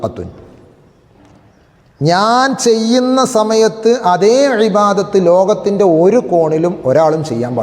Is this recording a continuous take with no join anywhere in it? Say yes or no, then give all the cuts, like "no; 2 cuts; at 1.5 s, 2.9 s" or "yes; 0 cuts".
yes; 0 cuts